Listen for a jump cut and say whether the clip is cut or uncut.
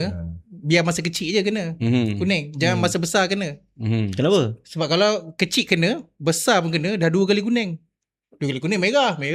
uncut